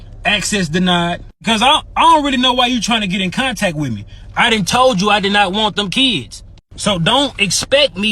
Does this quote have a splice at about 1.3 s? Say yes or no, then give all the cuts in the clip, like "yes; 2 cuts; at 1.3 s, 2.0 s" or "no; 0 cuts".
yes; 1 cut; at 1.3 s